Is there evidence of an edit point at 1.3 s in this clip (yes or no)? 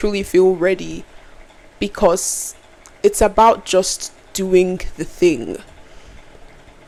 no